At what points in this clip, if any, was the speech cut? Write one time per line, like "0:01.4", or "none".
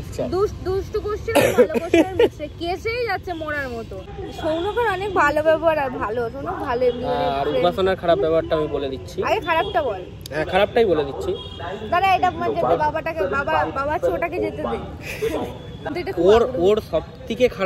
0:04.0
0:15.9